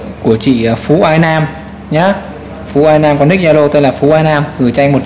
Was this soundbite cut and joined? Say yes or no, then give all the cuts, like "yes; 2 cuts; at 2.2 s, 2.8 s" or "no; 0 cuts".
no; 0 cuts